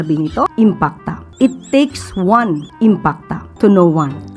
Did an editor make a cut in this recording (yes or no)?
yes